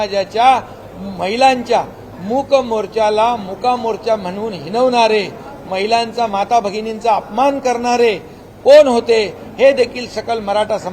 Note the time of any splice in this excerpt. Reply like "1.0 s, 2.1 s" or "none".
none